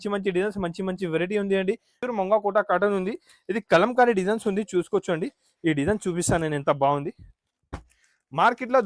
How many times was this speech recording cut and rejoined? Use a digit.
1